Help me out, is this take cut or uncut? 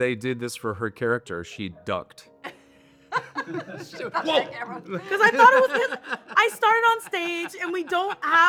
uncut